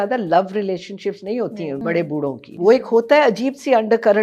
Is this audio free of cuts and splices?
no; 1 cut; at 2.1 s

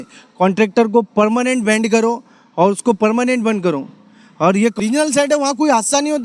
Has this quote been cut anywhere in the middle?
yes; 1 cut; at 4.8 s

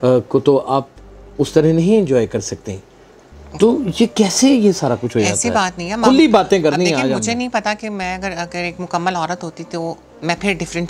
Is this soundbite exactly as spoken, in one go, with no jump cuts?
yes; 0 cuts

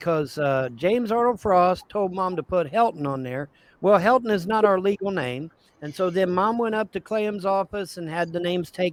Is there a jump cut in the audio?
no; 0 cuts

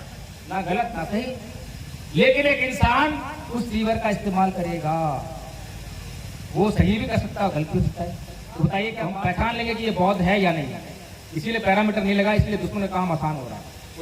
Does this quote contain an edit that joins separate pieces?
yes; 1 cut; at 9.0 s

